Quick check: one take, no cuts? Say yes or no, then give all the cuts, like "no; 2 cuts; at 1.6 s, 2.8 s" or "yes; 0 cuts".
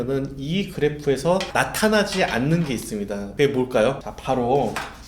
no; 3 cuts; at 1.5 s, 3.2 s, 4.1 s